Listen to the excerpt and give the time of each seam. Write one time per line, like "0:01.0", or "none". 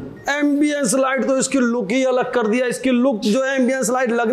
none